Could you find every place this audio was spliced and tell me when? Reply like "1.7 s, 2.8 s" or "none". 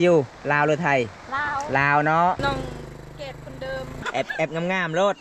2.4 s, 3.9 s